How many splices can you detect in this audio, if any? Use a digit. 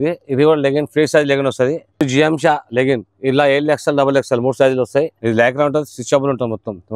2